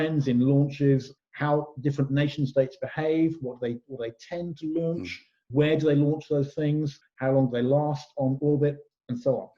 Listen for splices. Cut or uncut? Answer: cut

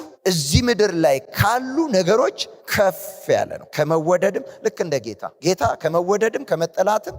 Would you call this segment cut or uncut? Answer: uncut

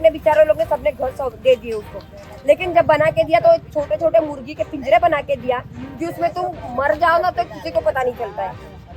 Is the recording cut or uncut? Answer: uncut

